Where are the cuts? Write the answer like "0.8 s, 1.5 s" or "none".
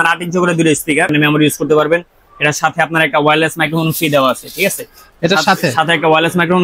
1.1 s